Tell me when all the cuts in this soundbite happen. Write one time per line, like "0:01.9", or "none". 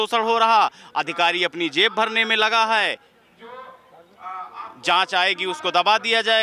none